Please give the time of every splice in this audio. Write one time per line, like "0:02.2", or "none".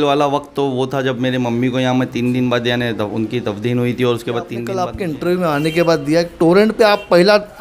0:04.7